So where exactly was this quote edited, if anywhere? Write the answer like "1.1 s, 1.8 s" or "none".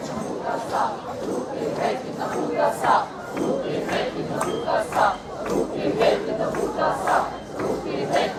none